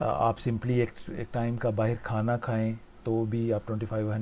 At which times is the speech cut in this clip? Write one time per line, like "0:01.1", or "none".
none